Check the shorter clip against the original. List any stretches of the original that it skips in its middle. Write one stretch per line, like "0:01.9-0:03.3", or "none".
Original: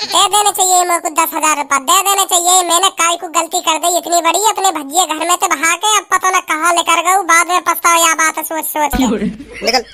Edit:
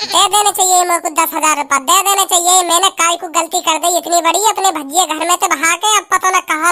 none